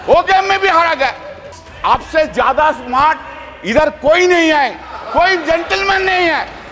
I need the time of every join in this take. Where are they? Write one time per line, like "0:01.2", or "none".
0:01.5